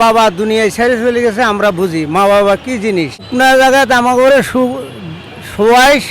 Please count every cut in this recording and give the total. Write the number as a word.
one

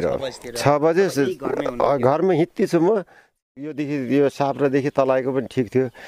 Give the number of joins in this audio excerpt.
one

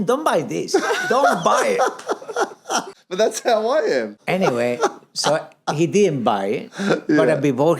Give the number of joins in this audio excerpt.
two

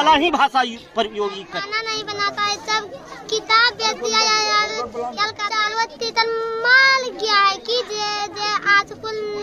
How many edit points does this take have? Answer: two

